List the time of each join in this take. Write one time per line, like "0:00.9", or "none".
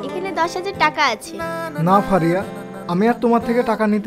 none